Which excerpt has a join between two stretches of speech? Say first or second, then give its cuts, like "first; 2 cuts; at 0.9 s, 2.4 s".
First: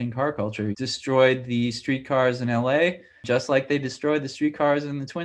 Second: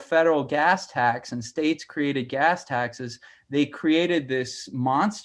first; 2 cuts; at 0.7 s, 3.2 s